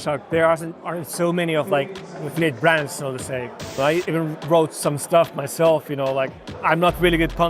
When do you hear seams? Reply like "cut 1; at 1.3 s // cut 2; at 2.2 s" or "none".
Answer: cut 1; at 3.8 s // cut 2; at 6.5 s